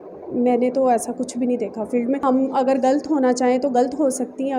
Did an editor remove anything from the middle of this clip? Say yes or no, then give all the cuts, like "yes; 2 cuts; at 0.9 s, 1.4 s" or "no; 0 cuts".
yes; 1 cut; at 2.2 s